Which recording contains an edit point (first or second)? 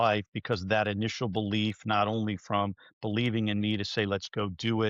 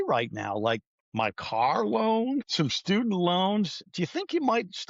second